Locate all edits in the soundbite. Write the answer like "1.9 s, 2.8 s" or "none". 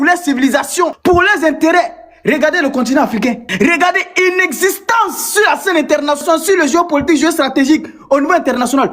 1.0 s, 6.2 s